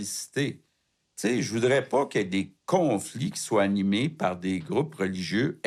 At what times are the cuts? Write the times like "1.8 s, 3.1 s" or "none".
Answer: none